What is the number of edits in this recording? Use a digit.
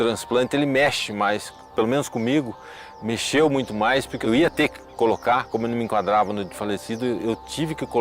2